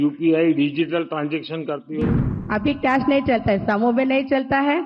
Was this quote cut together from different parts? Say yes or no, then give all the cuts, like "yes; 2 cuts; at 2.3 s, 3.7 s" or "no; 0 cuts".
yes; 1 cut; at 2.1 s